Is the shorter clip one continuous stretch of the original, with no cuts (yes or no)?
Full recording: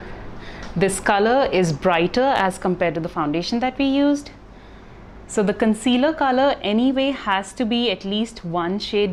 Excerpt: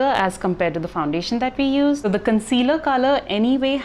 no